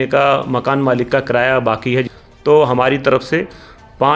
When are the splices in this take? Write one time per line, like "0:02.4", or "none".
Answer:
0:02.1